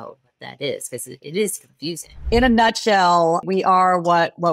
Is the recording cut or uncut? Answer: cut